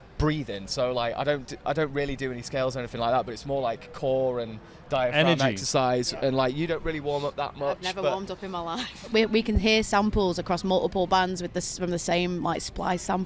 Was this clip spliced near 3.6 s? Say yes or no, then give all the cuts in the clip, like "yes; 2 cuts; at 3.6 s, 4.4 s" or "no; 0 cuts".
no; 1 cut; at 9.1 s